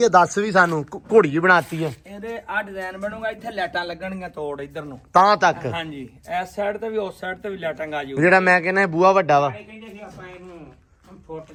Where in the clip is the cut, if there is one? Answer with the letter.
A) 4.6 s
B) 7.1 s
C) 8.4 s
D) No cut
D